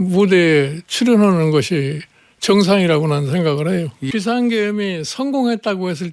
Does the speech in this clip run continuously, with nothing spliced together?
no; 1 cut; at 4.0 s

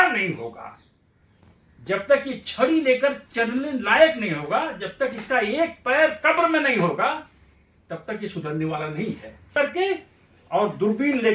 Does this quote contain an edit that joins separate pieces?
yes; 1 cut; at 9.5 s

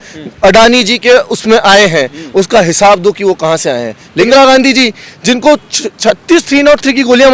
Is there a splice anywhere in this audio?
yes; 1 cut; at 4.3 s

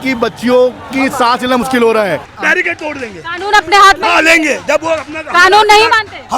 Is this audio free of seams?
no; 1 cut; at 2.3 s

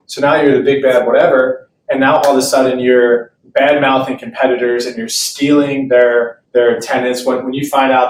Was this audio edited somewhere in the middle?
no; 0 cuts

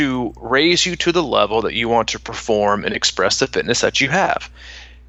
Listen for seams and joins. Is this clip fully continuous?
yes; 0 cuts

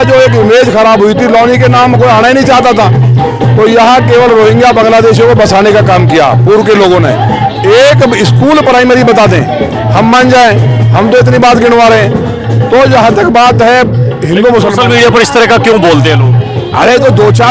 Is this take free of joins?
yes; 0 cuts

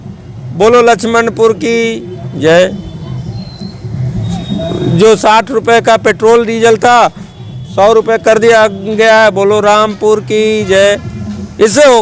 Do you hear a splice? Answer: no; 0 cuts

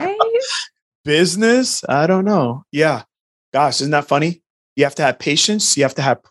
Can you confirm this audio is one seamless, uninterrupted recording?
no; 1 cut; at 2.6 s

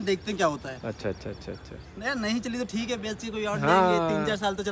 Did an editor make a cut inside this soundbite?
no; 0 cuts

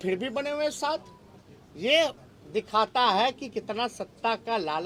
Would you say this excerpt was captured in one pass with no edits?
yes; 0 cuts

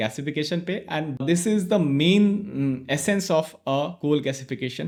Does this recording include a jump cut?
no; 0 cuts

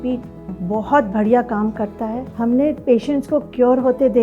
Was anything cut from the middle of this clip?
yes; 1 cut; at 2.2 s

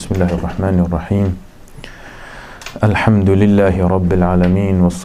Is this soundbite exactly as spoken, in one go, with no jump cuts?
yes; 0 cuts

